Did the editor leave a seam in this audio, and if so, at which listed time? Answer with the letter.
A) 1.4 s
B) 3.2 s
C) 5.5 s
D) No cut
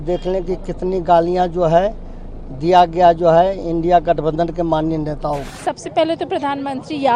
C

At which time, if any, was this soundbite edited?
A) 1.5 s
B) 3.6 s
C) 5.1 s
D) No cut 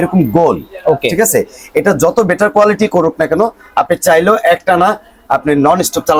D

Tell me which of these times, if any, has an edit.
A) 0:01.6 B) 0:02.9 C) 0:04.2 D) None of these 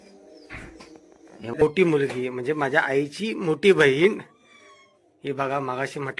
A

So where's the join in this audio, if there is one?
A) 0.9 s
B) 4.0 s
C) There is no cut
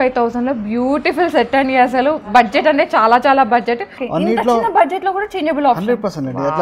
B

